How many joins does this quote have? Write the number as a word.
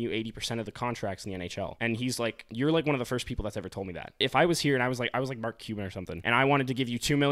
four